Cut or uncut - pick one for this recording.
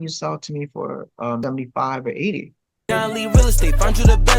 cut